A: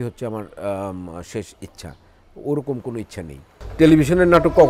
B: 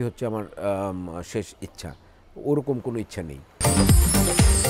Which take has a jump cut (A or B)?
A